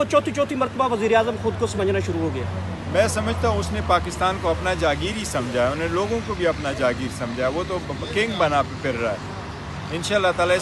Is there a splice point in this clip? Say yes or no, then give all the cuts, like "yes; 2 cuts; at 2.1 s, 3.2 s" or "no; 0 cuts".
no; 0 cuts